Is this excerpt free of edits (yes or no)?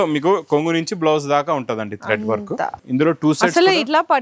no